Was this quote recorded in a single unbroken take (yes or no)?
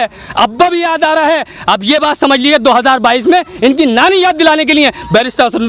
yes